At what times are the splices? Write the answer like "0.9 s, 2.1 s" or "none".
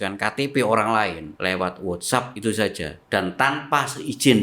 1.3 s, 2.9 s